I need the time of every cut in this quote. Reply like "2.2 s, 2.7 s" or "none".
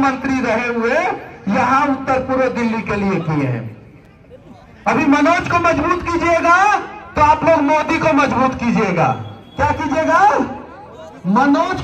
none